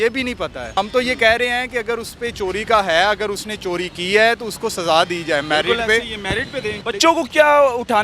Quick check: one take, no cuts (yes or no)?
no